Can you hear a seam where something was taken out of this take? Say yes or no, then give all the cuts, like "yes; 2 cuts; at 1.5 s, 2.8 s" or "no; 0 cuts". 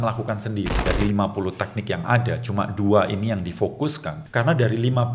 yes; 2 cuts; at 0.8 s, 4.1 s